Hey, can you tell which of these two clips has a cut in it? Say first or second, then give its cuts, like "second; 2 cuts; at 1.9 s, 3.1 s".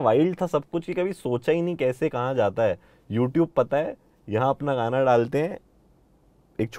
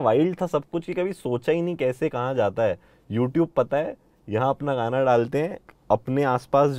second; 1 cut; at 5.7 s